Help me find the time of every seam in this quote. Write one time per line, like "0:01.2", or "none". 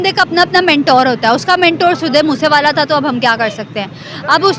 none